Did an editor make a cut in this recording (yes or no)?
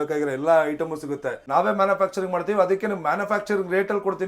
yes